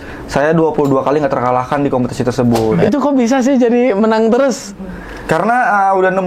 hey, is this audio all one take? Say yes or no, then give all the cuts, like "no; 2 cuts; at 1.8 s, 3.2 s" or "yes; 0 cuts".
no; 1 cut; at 2.8 s